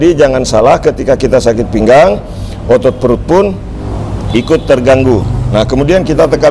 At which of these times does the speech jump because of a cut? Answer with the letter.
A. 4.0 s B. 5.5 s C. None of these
C